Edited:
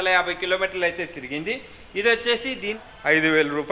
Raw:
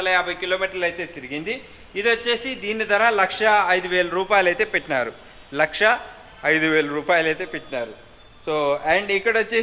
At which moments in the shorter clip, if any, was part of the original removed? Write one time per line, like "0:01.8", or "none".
0:02.7